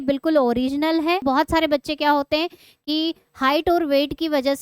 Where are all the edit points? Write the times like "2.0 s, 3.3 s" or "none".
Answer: 1.2 s